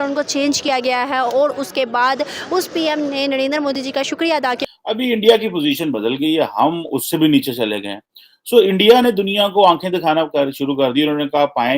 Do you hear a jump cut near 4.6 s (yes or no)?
yes